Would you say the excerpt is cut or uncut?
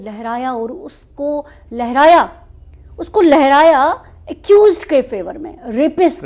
uncut